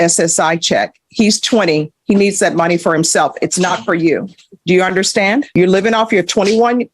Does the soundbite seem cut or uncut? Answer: cut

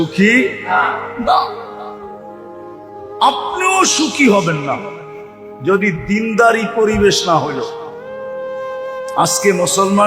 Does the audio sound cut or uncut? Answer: cut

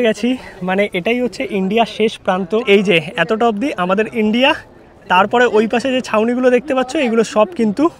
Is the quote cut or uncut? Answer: cut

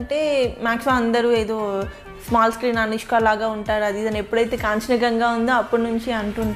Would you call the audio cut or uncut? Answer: uncut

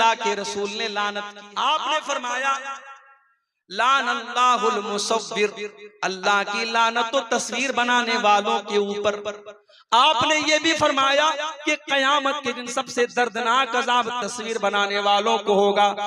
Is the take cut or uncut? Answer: cut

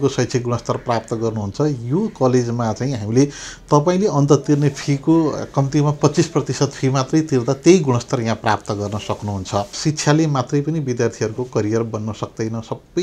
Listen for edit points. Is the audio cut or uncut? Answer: cut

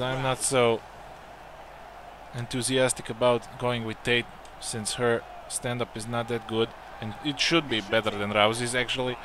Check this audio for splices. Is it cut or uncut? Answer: uncut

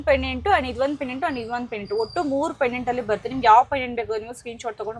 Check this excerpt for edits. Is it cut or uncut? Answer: uncut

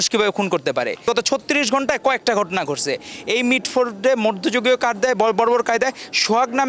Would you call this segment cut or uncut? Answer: uncut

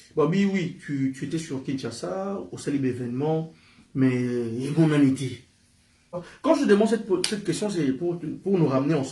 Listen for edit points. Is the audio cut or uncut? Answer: cut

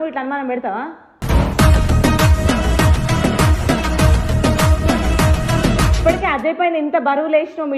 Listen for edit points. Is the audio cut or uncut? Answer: cut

